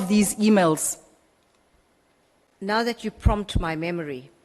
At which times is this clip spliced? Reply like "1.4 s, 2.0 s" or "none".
2.5 s